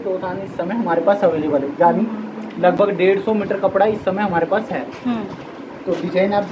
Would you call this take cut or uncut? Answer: uncut